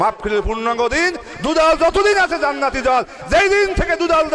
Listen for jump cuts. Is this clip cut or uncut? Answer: uncut